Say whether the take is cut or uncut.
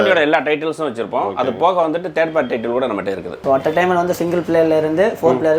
cut